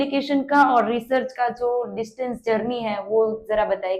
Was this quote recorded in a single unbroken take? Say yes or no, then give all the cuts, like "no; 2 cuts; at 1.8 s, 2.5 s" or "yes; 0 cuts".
yes; 0 cuts